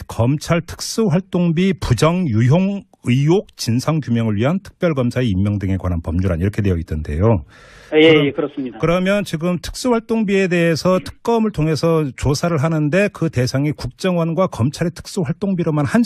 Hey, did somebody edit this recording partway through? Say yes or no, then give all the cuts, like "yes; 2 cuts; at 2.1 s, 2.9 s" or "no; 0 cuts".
no; 0 cuts